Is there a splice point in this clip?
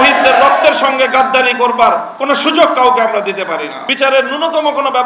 yes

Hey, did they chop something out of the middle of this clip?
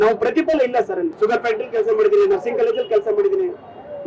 yes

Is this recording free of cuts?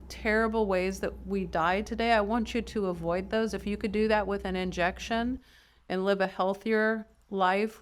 yes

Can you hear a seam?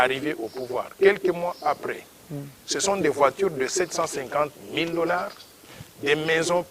no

